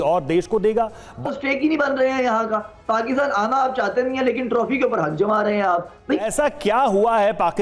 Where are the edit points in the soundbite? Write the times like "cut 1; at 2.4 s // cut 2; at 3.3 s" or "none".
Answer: cut 1; at 1.2 s // cut 2; at 6.2 s

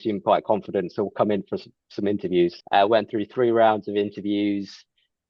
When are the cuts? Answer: cut 1; at 2.6 s

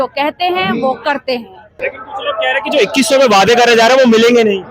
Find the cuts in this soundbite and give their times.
cut 1; at 1.8 s

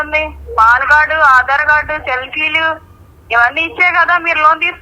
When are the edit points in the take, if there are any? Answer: none

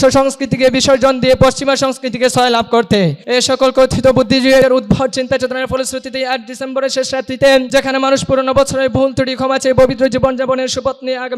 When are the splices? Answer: cut 1; at 3.2 s // cut 2; at 4.6 s // cut 3; at 7.7 s

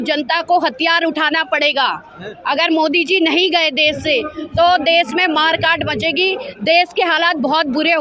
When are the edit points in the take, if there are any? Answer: none

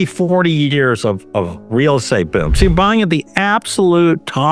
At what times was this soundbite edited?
none

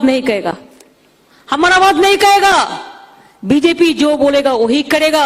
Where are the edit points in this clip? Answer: none

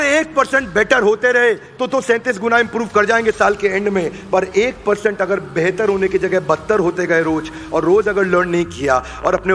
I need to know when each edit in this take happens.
none

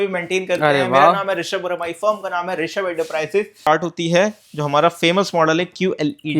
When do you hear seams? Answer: cut 1; at 3.7 s

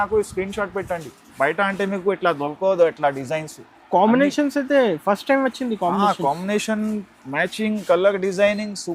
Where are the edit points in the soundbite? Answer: cut 1; at 1.2 s

